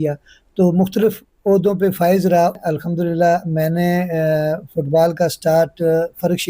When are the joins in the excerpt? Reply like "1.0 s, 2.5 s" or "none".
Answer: 2.5 s